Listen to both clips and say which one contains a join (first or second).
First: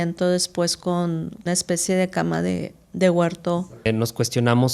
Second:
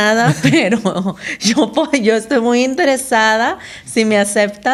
first